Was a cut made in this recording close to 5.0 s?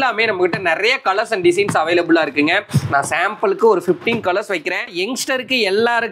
yes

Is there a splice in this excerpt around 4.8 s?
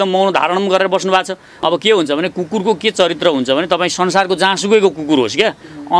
no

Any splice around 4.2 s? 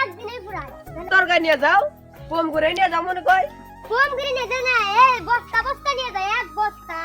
no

